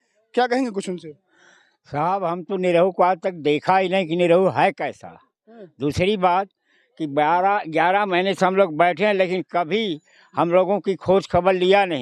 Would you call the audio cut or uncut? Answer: uncut